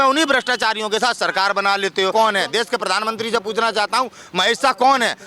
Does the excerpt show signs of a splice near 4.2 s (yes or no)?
no